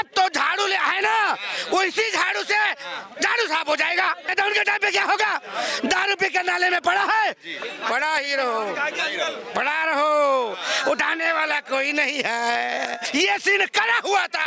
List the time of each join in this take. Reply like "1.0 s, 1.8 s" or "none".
4.3 s, 13.0 s